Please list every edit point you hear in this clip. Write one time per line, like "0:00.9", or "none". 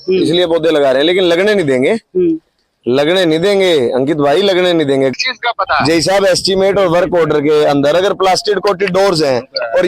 0:05.1